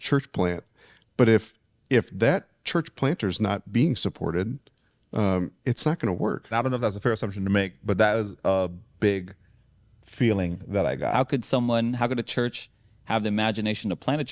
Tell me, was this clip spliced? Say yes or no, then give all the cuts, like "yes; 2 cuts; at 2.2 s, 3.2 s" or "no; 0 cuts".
yes; 2 cuts; at 6.5 s, 11.1 s